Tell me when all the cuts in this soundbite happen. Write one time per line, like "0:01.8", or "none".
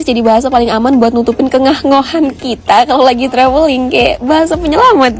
none